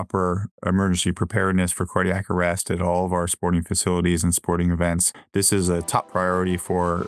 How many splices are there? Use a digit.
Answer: 1